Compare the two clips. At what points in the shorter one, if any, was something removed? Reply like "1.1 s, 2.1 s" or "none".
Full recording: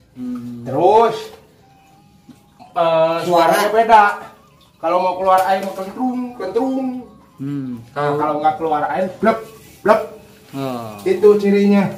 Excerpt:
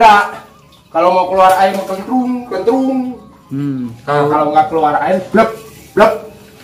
none